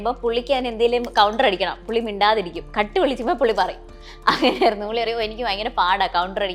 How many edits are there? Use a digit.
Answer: 0